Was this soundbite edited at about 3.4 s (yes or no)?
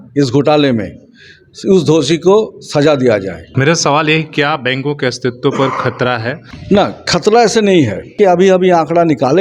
yes